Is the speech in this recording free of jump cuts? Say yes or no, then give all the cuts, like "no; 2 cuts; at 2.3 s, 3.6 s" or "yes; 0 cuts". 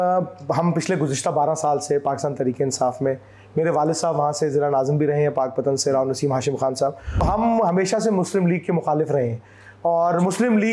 no; 1 cut; at 7.2 s